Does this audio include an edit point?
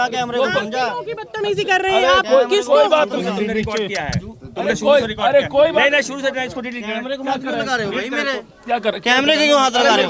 no; 0 cuts

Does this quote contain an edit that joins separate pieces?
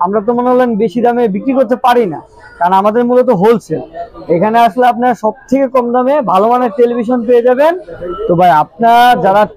no; 0 cuts

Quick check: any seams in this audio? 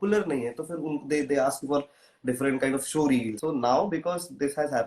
yes; 1 cut; at 3.3 s

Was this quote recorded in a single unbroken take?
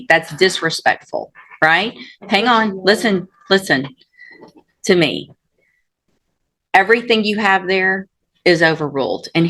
yes; 0 cuts

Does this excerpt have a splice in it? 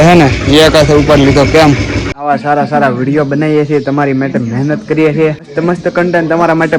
yes; 2 cuts; at 2.2 s, 5.5 s

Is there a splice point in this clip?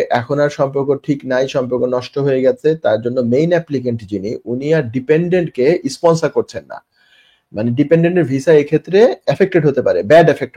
no; 0 cuts

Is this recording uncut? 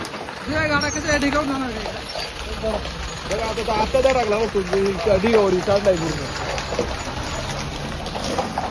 yes; 0 cuts

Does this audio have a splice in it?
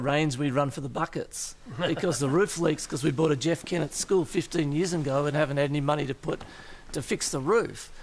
no; 0 cuts

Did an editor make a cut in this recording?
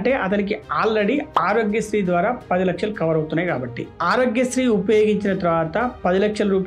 no; 0 cuts

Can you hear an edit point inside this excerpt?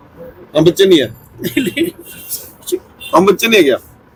no; 0 cuts

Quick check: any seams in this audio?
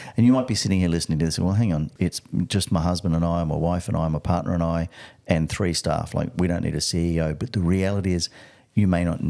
yes; 1 cut; at 1.9 s

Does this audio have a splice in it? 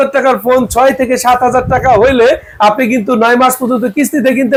no; 0 cuts

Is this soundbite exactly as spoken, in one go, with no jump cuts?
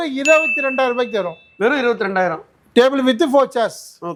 yes; 0 cuts

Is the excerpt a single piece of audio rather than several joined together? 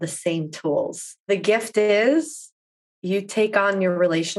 no; 1 cut; at 1.3 s

